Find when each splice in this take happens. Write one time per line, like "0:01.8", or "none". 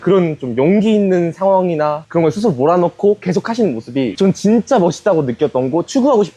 none